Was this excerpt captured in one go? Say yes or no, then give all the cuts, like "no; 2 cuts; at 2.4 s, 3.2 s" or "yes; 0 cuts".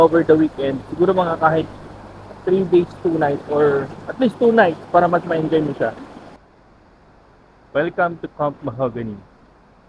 yes; 0 cuts